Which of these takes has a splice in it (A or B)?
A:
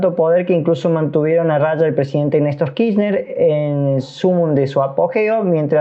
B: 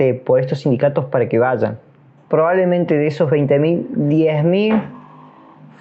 B